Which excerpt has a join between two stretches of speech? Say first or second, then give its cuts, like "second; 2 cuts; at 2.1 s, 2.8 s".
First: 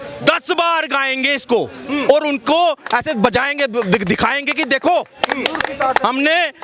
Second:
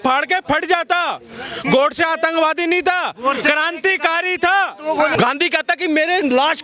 second; 1 cut; at 5.1 s